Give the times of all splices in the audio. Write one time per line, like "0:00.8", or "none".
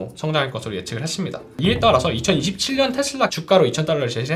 0:01.6
0:03.3